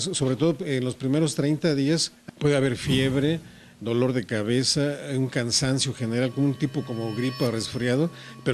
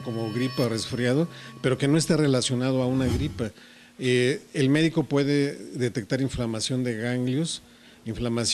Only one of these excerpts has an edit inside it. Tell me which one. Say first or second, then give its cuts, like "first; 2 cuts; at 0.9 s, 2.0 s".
first; 1 cut; at 2.2 s